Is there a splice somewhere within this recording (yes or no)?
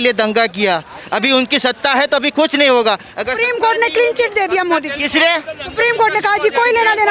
no